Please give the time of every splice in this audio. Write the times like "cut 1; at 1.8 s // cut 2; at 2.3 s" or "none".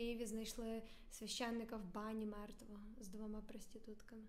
none